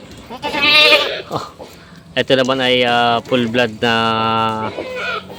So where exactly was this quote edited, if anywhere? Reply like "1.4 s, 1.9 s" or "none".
none